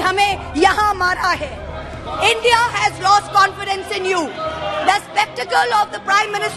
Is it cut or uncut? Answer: uncut